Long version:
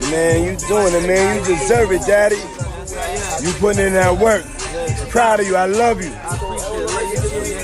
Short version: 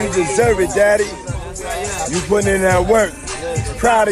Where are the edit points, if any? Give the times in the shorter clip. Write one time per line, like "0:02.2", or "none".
none